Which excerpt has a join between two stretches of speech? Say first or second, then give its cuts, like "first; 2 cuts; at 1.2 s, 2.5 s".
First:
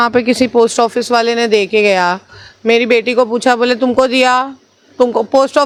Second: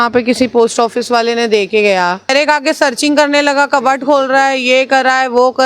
second; 1 cut; at 2.3 s